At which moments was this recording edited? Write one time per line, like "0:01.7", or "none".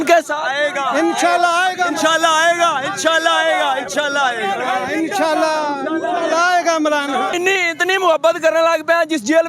0:07.3